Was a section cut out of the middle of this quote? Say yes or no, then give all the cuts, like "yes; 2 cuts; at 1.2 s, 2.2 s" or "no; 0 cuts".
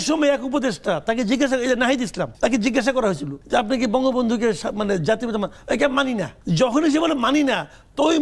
yes; 3 cuts; at 2.2 s, 3.3 s, 6.3 s